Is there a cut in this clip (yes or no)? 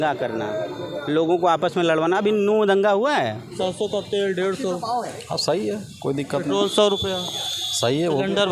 yes